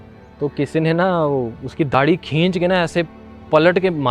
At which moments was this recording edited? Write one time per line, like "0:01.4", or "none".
0:01.9